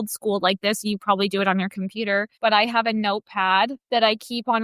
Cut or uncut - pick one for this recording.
cut